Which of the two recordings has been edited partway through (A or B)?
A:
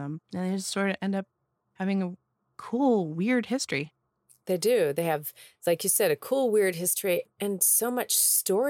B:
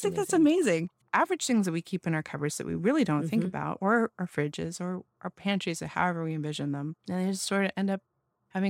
B